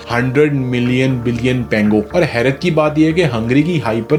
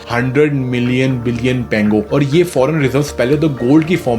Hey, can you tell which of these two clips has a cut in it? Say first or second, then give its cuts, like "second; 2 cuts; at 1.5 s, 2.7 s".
second; 1 cut; at 2.1 s